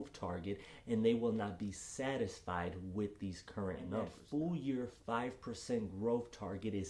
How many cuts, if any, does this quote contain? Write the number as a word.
one